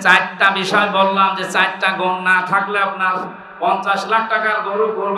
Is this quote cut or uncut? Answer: uncut